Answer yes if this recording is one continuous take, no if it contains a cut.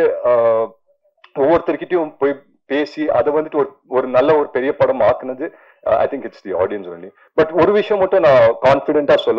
yes